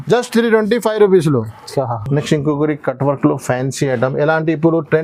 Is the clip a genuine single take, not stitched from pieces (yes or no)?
yes